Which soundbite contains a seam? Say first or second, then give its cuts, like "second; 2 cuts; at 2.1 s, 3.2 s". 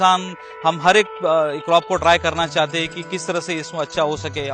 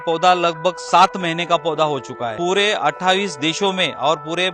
second; 1 cut; at 2.3 s